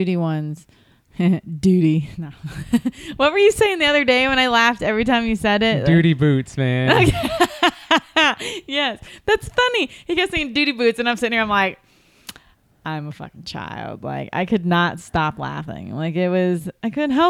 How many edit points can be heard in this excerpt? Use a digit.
0